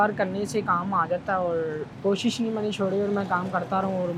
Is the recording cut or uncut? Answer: uncut